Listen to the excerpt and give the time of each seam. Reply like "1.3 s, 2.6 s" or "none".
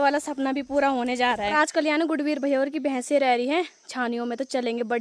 1.5 s